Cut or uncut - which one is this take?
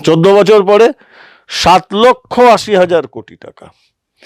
uncut